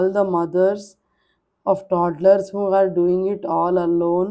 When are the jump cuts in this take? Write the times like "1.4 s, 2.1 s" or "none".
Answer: none